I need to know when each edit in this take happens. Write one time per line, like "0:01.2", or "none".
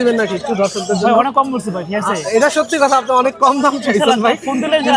none